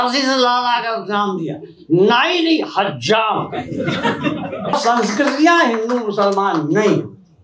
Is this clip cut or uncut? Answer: cut